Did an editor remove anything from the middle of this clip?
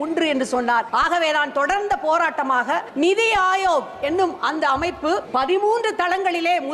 yes; 3 cuts; at 0.9 s, 2.9 s, 5.3 s

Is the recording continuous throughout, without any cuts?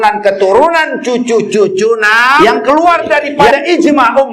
no; 1 cut; at 2.4 s

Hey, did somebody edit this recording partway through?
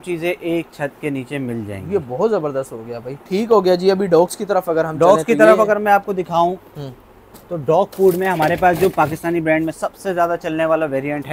no; 0 cuts

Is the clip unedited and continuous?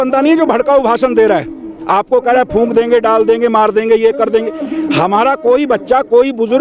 yes; 0 cuts

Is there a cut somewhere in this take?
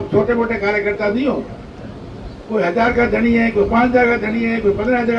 no; 0 cuts

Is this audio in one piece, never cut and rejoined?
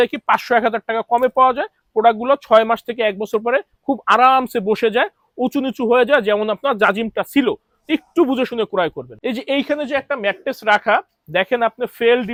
yes; 0 cuts

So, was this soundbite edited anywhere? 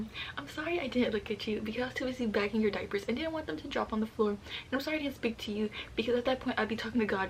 no; 0 cuts

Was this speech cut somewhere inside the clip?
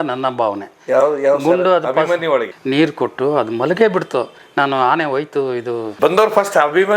yes; 2 cuts; at 2.5 s, 5.9 s

